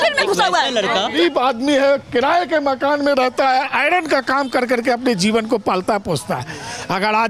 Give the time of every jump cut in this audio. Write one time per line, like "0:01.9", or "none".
0:01.1